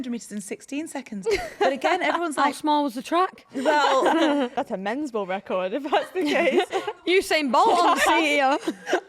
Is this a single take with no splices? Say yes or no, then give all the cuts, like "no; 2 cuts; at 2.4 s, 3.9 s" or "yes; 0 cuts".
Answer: no; 1 cut; at 4.5 s